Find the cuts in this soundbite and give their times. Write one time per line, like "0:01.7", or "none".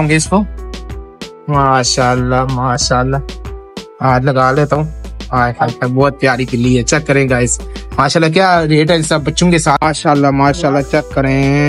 0:09.8